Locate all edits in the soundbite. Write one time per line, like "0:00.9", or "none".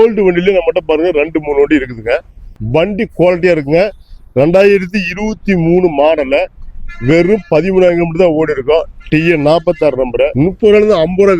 0:02.6
0:10.3